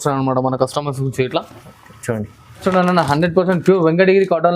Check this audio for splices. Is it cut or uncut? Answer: cut